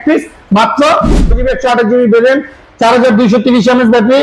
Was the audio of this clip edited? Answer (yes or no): yes